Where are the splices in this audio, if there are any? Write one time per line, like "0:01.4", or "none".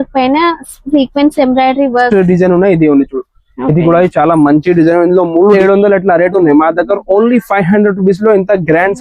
0:02.1
0:05.5

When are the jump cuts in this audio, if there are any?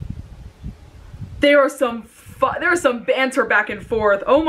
none

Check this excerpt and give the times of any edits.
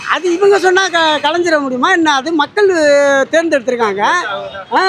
none

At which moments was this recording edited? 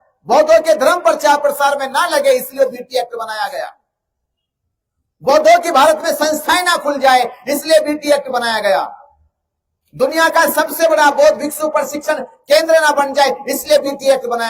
none

